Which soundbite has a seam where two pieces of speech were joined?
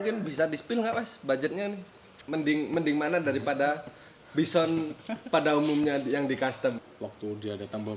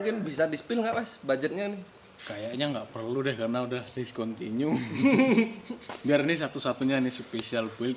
first; 2 cuts; at 2.2 s, 6.9 s

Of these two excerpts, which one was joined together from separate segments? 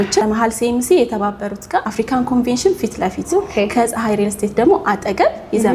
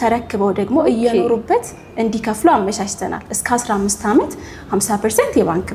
first; 1 cut; at 1.9 s

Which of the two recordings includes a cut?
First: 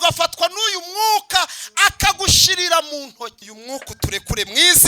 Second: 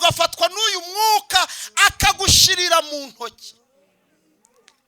first; 1 cut; at 3.5 s

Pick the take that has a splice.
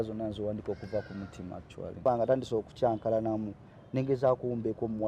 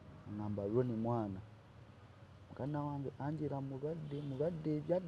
first; 1 cut; at 2.0 s

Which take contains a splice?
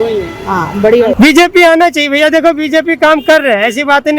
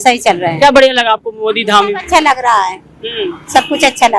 first; 1 cut; at 1.1 s

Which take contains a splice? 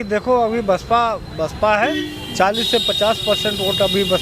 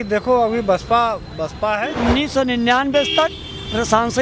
second; 1 cut; at 1.9 s

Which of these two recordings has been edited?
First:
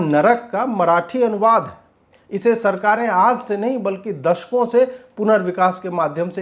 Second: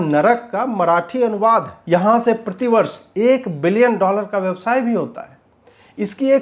second; 1 cut; at 1.8 s

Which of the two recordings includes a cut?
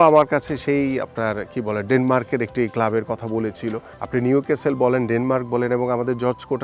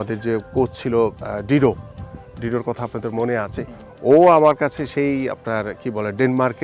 first; 1 cut; at 3.9 s

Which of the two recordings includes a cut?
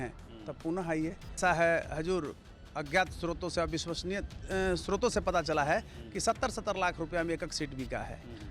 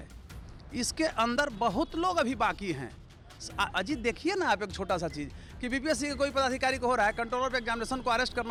first; 1 cut; at 1.4 s

